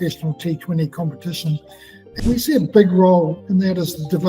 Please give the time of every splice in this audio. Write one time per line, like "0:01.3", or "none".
0:02.1
0:03.4